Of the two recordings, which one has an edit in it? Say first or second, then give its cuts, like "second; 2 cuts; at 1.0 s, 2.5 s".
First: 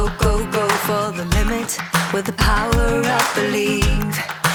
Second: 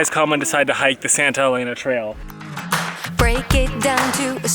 second; 1 cut; at 2.3 s